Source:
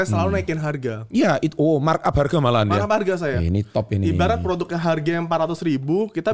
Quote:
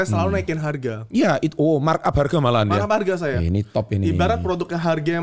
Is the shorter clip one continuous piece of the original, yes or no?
yes